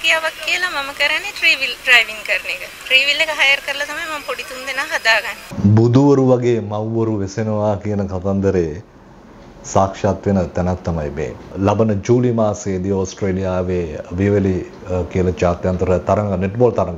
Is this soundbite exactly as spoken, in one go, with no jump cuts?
no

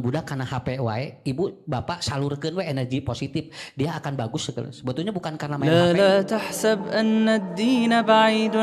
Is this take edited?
yes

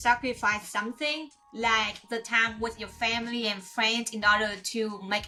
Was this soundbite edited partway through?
no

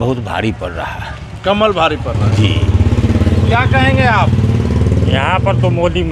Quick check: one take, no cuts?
yes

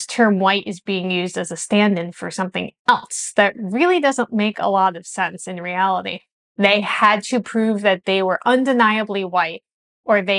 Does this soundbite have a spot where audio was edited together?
yes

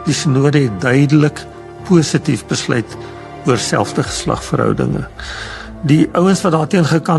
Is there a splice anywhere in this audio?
no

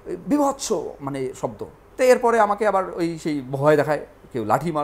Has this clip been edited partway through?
yes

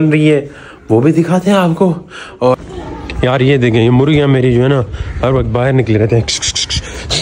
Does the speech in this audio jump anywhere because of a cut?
yes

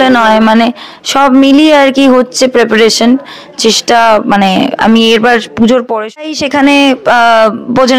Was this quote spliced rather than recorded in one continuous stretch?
yes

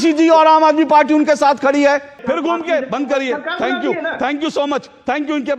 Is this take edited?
yes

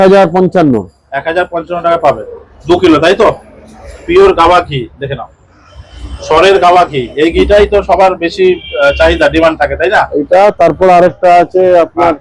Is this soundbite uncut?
yes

